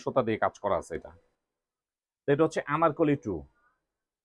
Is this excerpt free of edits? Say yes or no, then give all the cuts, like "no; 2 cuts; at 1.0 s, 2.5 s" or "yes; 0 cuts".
yes; 0 cuts